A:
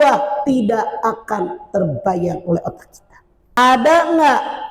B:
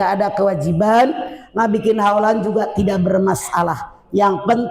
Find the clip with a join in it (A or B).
A